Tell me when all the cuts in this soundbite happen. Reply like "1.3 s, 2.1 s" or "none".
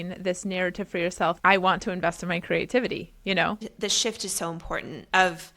1.4 s, 3.7 s